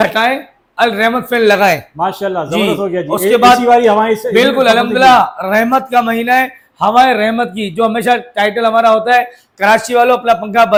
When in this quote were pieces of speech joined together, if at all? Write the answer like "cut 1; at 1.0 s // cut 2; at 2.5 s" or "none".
none